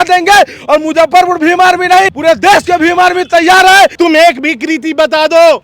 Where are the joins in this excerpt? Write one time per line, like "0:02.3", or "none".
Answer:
0:02.1
0:03.9